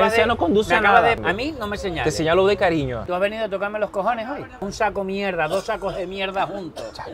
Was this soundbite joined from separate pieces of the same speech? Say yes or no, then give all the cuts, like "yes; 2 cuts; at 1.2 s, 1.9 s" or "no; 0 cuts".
yes; 3 cuts; at 1.2 s, 3.0 s, 4.6 s